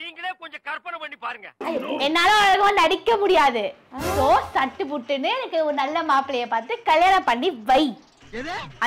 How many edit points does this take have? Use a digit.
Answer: 1